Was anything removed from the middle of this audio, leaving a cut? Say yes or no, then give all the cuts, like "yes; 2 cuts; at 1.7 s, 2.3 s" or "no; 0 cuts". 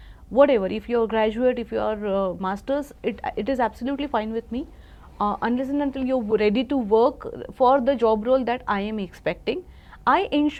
no; 0 cuts